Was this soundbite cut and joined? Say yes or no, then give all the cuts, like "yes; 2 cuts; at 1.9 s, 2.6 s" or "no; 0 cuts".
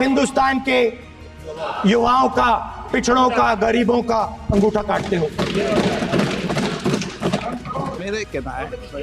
yes; 1 cut; at 8.0 s